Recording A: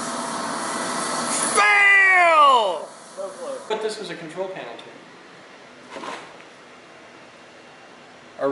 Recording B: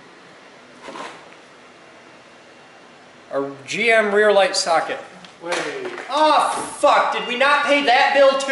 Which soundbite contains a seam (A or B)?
A